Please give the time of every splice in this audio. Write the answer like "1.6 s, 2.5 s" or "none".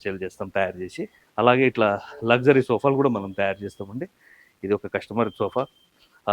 1.2 s

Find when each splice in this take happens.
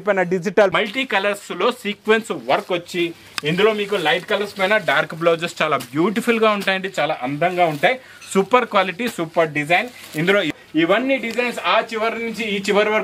0.7 s, 10.5 s

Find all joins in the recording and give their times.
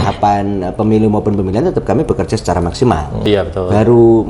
3.2 s

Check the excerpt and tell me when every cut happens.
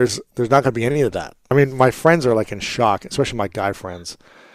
1.5 s

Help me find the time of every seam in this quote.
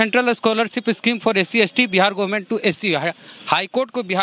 none

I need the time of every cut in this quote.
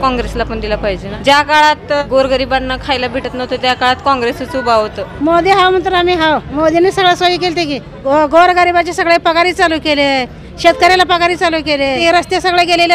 1.1 s, 2.0 s, 5.0 s, 6.5 s, 7.9 s, 12.0 s

